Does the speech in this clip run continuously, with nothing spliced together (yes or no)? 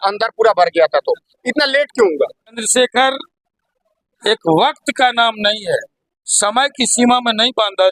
no